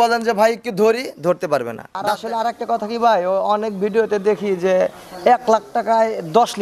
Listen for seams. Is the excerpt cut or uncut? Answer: cut